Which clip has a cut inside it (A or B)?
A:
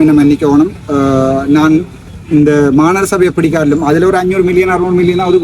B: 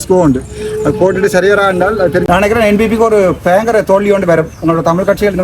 B